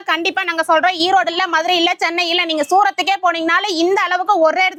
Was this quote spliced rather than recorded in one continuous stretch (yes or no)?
no